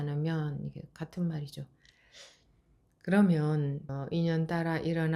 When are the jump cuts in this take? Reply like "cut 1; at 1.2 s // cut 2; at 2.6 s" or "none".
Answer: cut 1; at 3.9 s